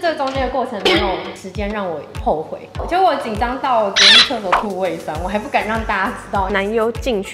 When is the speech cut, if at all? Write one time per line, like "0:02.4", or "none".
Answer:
0:02.7
0:06.5